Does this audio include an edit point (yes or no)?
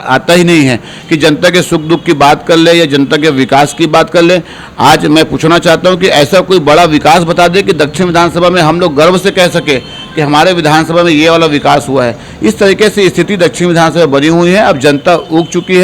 no